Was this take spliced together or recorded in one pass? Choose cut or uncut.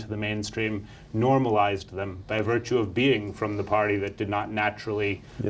uncut